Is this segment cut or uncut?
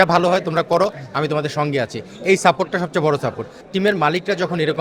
cut